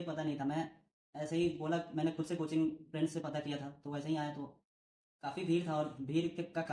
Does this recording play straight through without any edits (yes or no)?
yes